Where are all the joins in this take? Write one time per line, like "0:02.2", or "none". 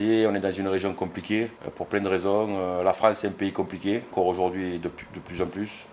none

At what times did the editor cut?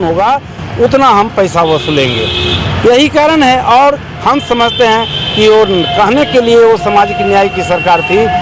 none

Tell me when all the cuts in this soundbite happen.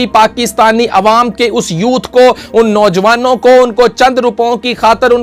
none

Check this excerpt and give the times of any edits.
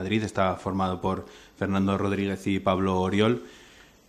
none

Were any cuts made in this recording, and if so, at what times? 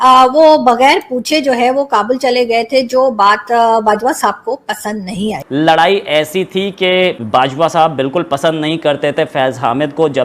0:05.4

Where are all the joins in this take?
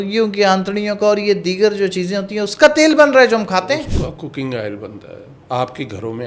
0:05.4

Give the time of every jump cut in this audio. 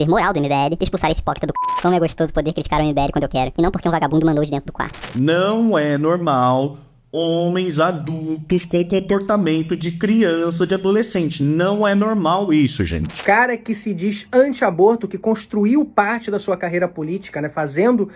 0:01.8
0:05.0
0:13.1

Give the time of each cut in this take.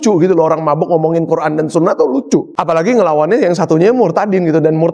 0:02.5

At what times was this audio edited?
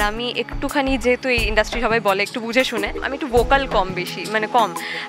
0:03.1

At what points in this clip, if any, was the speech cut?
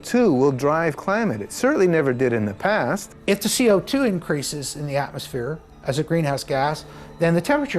0:03.1

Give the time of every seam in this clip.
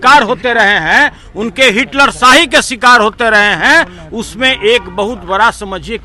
none

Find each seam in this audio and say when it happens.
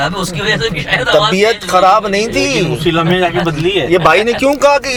none

